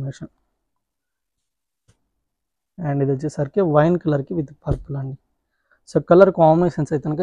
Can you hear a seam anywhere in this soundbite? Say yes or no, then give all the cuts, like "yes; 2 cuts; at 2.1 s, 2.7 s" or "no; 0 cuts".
no; 0 cuts